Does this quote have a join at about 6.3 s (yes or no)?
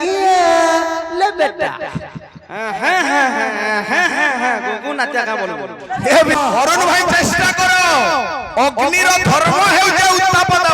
yes